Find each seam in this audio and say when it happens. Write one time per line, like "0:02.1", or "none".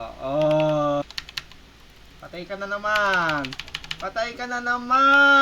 0:01.0